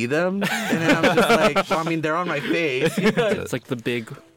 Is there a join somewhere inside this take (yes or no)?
yes